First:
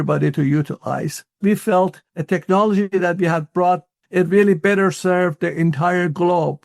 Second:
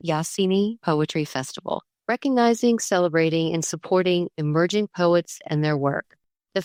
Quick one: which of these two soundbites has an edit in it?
first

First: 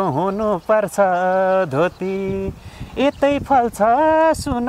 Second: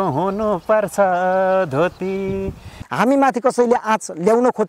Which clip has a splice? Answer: second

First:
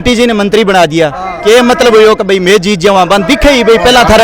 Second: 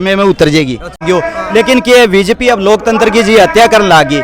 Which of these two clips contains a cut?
second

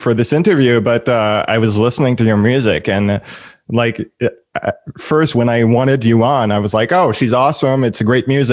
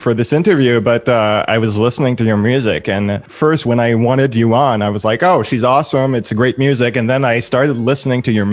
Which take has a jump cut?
second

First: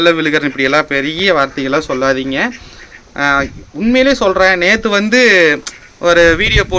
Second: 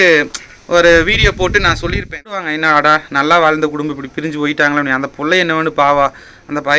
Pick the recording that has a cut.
second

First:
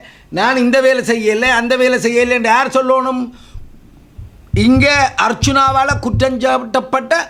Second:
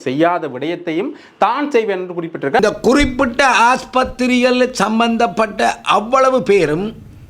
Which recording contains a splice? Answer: second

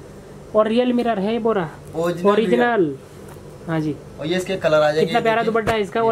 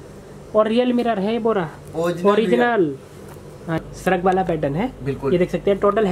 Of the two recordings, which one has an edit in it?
second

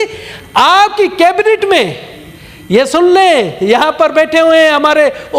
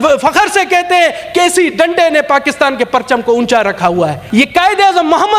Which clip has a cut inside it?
second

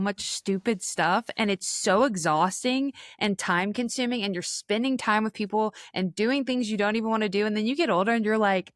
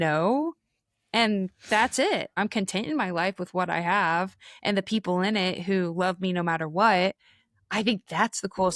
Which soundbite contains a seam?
second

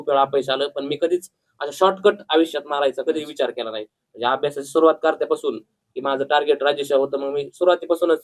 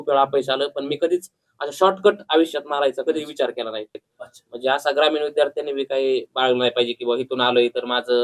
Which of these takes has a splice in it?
second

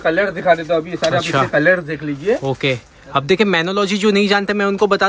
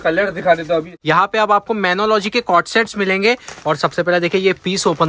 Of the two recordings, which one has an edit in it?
second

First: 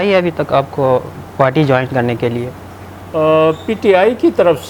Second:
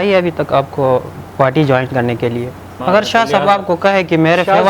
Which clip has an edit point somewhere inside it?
second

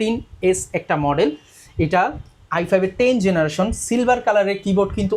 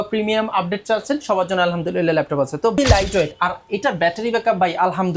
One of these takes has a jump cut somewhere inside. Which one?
second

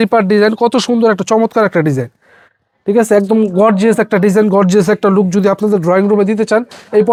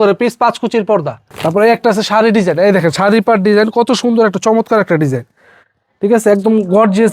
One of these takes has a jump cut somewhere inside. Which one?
second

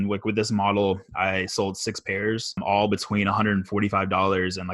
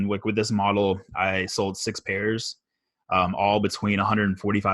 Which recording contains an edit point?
first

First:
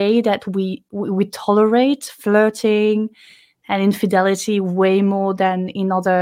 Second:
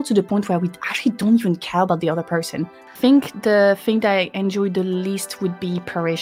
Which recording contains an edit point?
second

